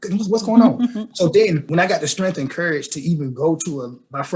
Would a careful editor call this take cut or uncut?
cut